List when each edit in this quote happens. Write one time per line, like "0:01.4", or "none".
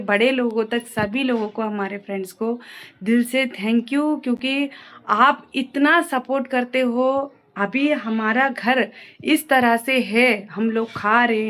none

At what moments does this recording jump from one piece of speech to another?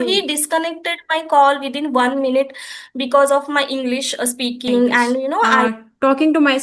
0:05.7

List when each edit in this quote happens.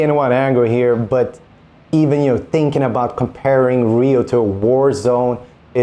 none

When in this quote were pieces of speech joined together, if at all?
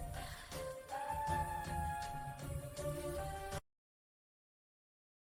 none

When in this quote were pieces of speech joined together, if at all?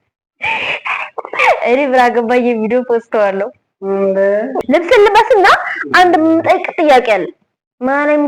0:01.4
0:04.6

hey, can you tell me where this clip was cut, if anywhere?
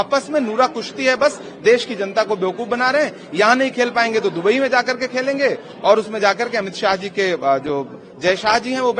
none

